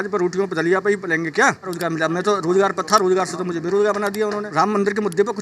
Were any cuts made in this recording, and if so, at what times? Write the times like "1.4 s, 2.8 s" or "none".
1.7 s, 4.5 s